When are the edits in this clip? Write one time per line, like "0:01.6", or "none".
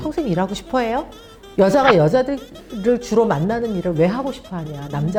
none